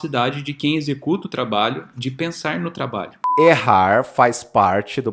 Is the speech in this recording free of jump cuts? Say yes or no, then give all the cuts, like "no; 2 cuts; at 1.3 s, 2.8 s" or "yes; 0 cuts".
no; 1 cut; at 3.2 s